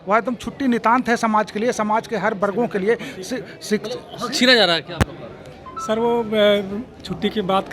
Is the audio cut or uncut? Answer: uncut